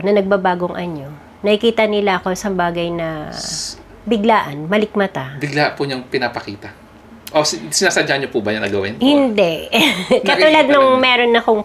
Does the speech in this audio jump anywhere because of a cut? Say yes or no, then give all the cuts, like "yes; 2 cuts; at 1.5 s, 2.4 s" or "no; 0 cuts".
no; 0 cuts